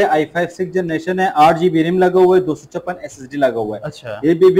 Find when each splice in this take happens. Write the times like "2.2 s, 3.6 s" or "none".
none